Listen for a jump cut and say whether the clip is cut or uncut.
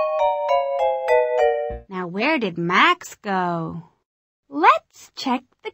uncut